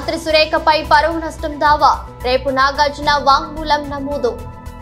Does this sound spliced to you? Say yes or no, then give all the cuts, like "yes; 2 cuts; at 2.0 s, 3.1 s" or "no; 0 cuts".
no; 0 cuts